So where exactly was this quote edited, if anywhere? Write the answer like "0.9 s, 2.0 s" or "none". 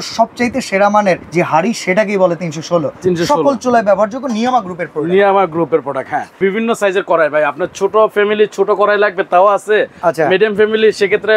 1.2 s, 6.4 s